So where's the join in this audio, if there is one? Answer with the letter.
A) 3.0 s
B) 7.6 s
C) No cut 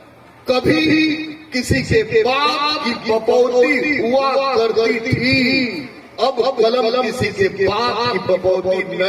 C